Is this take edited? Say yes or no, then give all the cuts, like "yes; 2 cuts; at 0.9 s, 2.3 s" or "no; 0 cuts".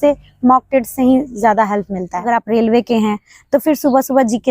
yes; 1 cut; at 2.2 s